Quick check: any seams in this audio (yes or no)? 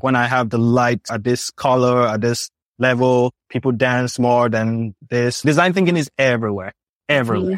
yes